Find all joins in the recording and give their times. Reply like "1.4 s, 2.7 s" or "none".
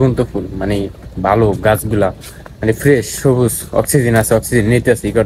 none